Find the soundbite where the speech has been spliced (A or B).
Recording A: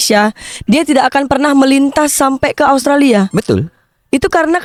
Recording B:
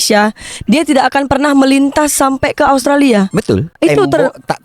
B